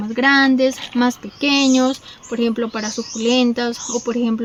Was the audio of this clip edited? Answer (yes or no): no